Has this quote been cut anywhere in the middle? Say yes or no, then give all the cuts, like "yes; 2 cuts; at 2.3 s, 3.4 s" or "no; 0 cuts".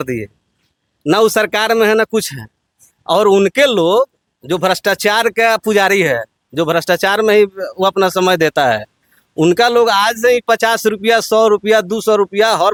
no; 0 cuts